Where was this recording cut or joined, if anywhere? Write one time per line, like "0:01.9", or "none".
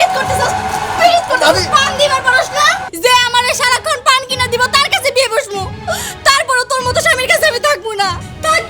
0:02.9